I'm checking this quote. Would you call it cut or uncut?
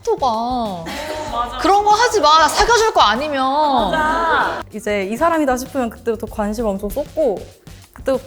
cut